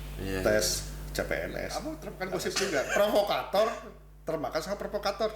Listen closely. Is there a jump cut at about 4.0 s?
no; 1 cut; at 2.1 s

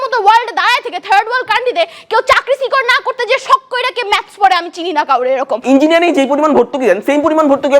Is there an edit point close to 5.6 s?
yes; 1 cut; at 5.6 s

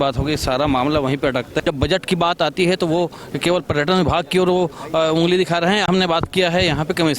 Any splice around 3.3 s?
no; 2 cuts; at 1.5 s, 5.9 s

